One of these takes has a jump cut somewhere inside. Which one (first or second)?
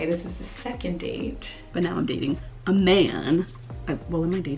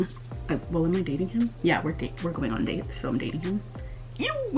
first